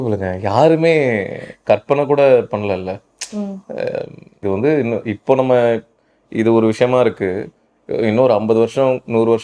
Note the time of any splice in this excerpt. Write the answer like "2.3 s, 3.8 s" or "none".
4.4 s